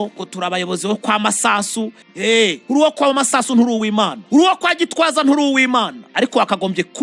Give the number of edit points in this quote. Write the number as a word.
one